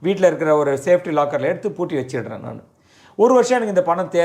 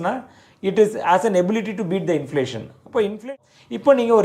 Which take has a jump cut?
second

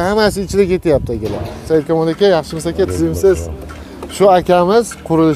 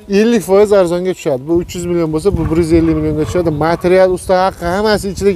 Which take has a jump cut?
first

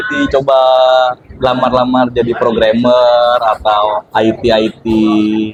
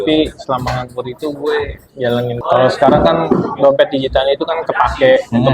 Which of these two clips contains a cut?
second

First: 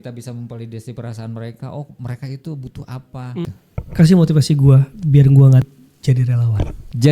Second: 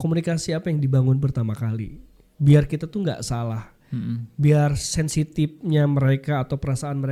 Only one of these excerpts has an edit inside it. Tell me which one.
first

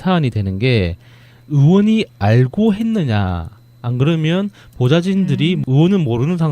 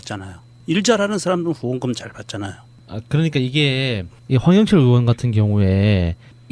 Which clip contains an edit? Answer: first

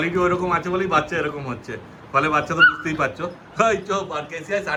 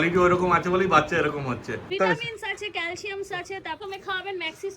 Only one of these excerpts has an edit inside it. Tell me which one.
second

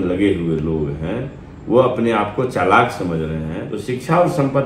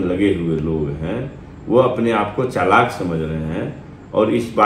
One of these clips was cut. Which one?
first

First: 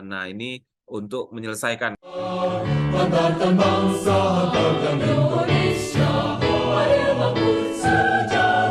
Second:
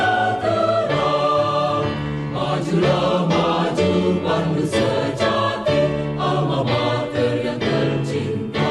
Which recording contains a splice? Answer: first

